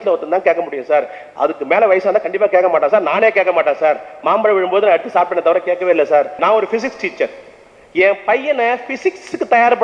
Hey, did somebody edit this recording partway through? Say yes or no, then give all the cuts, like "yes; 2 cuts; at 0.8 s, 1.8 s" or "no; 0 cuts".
yes; 1 cut; at 6.4 s